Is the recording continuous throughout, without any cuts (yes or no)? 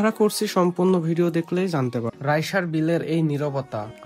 no